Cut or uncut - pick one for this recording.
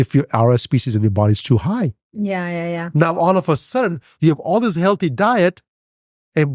uncut